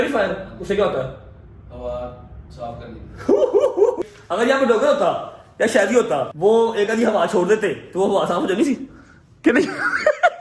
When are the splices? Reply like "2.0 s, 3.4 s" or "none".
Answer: 4.0 s, 6.3 s

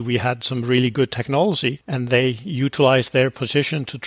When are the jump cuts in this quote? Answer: none

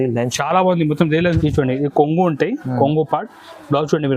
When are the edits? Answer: 1.2 s

